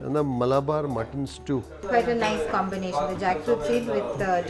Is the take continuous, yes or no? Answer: no